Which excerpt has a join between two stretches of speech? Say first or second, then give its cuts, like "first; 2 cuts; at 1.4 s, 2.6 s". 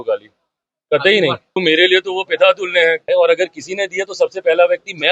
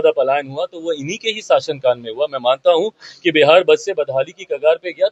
first; 2 cuts; at 1.6 s, 3.0 s